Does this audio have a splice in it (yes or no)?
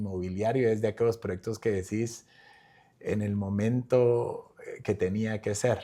no